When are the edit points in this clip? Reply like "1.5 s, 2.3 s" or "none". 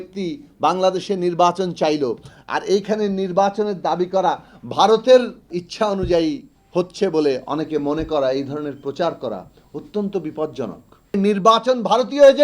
5.6 s, 11.2 s